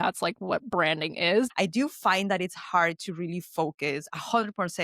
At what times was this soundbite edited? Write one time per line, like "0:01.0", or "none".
0:01.5